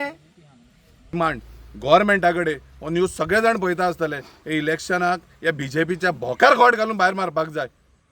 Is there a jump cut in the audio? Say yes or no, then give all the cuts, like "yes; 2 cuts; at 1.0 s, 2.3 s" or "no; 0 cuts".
yes; 1 cut; at 1.1 s